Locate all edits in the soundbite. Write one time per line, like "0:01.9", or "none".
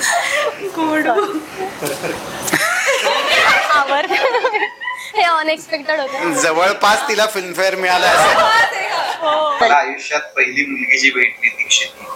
0:09.6